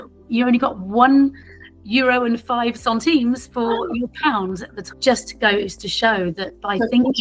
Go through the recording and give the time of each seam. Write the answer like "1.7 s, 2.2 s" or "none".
4.9 s